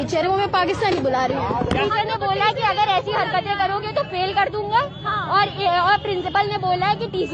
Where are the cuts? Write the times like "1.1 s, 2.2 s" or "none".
1.8 s